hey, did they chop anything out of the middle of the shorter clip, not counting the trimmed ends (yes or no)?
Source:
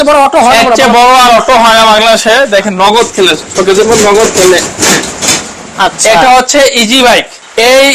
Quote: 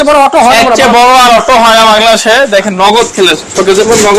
no